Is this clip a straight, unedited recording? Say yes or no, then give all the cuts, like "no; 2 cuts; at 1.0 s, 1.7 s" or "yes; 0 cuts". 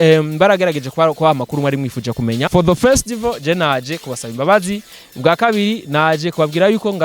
no; 1 cut; at 2.5 s